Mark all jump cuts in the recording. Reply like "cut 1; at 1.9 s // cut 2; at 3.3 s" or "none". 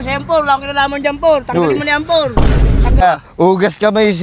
cut 1; at 3.0 s